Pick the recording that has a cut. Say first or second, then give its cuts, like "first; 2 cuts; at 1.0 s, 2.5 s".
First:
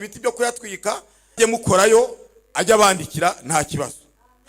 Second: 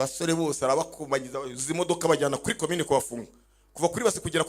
first; 1 cut; at 1.4 s